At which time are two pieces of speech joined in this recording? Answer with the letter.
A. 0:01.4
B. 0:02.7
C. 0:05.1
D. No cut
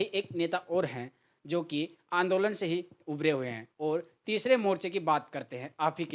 D